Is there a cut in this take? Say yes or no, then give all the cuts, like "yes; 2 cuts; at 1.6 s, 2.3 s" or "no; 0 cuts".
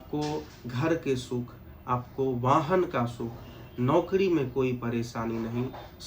no; 0 cuts